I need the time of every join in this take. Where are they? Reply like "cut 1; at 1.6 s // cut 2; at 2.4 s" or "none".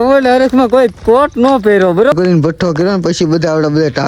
cut 1; at 2.1 s